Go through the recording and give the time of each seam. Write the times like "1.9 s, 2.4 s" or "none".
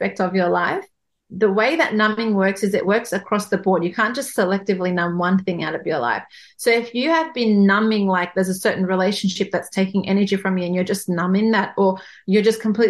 none